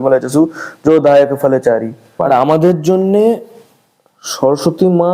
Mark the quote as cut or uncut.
cut